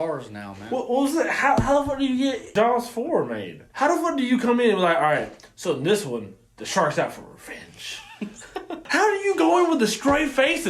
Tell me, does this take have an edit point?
yes; 3 cuts; at 2.4 s, 3.6 s, 8.8 s

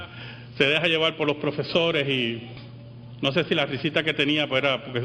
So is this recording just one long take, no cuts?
yes; 0 cuts

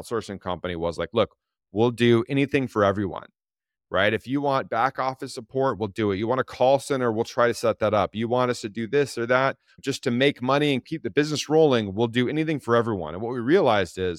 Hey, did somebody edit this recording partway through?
yes; 2 cuts; at 9.7 s, 10.9 s

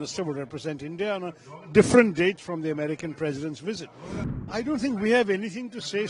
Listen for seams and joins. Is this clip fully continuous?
no; 1 cut; at 4.4 s

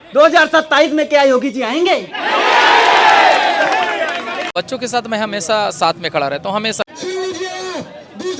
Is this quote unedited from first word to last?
no; 2 cuts; at 4.5 s, 6.8 s

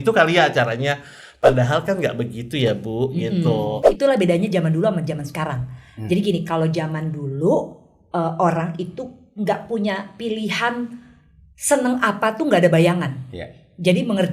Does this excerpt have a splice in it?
yes; 1 cut; at 3.8 s

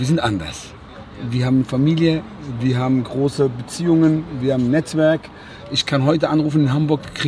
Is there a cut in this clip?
no; 0 cuts

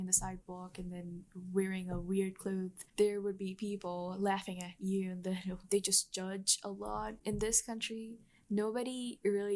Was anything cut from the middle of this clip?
yes; 3 cuts; at 2.8 s, 5.6 s, 7.2 s

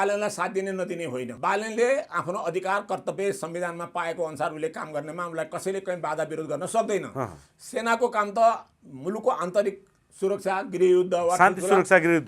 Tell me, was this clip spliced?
yes; 1 cut; at 1.3 s

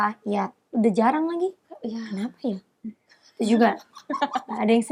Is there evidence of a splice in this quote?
no; 0 cuts

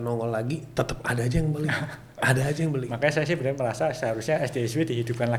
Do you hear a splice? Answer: no; 0 cuts

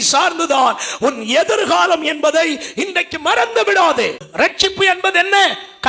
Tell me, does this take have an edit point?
yes; 1 cut; at 4.2 s

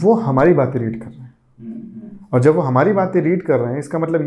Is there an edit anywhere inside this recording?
no; 0 cuts

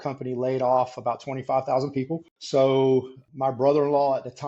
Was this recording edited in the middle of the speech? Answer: yes; 2 cuts; at 2.3 s, 3.2 s

